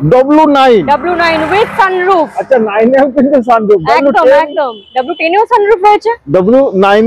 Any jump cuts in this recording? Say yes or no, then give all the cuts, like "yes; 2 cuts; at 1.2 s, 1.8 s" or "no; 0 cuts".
no; 0 cuts